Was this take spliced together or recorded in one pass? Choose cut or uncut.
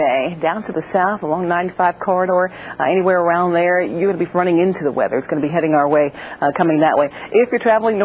uncut